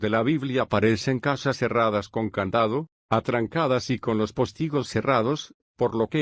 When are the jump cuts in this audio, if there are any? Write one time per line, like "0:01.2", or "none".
0:01.7